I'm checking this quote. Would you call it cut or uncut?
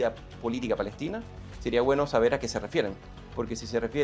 uncut